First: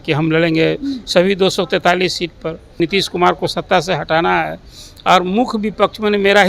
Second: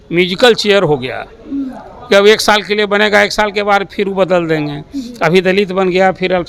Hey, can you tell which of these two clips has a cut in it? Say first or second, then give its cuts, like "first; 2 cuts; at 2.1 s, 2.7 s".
first; 1 cut; at 2.8 s